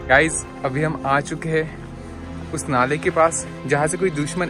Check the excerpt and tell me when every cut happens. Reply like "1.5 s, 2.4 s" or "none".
none